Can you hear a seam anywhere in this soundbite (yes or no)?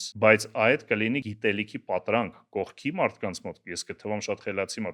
yes